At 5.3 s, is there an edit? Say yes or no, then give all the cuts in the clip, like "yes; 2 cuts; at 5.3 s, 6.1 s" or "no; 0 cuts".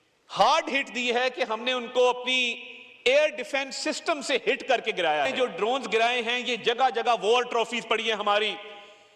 yes; 1 cut; at 5.3 s